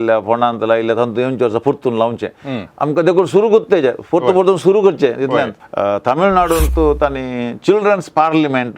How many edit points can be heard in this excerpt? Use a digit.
1